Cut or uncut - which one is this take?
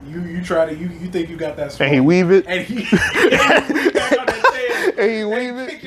uncut